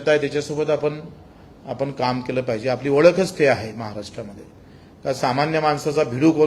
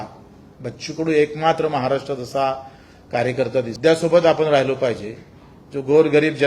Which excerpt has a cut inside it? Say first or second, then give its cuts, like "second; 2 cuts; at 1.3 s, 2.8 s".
second; 1 cut; at 3.7 s